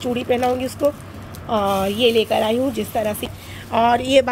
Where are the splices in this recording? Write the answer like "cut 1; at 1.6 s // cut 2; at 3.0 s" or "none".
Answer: cut 1; at 3.3 s